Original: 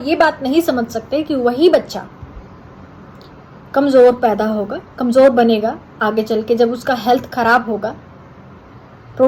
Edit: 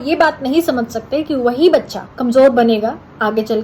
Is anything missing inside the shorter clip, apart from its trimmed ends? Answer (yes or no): yes